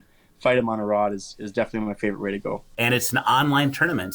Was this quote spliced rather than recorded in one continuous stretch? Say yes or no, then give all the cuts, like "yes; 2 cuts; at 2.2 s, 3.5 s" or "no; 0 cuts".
yes; 1 cut; at 2.7 s